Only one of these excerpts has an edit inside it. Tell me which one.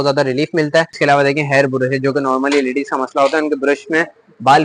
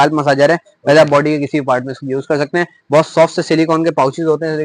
first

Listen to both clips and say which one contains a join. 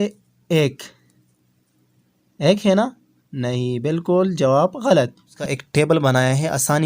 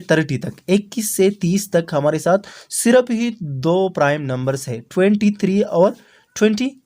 first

